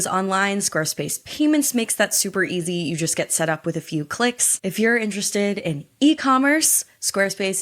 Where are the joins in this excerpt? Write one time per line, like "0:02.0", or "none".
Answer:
0:04.5